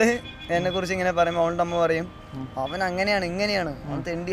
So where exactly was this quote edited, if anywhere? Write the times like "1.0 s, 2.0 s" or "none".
none